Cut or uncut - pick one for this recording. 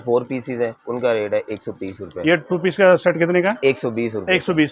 uncut